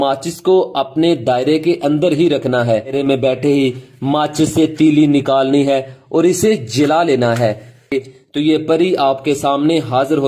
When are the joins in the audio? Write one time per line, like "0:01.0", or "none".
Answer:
0:02.9
0:07.9